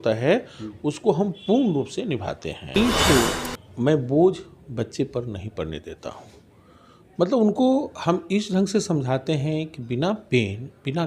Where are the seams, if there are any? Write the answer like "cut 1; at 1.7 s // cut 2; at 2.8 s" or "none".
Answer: cut 1; at 2.8 s